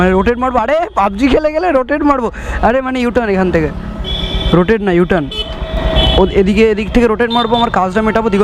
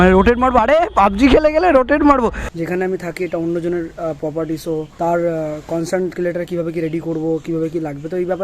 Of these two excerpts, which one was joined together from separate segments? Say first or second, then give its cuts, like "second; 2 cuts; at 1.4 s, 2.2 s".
second; 1 cut; at 2.5 s